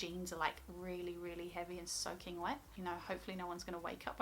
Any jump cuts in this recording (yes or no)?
yes